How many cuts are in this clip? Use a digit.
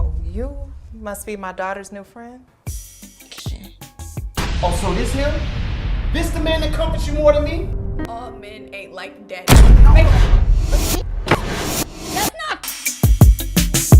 3